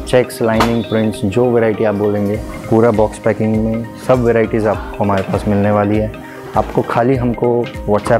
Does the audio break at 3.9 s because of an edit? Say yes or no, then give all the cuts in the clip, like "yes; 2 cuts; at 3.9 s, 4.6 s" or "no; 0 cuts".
no; 0 cuts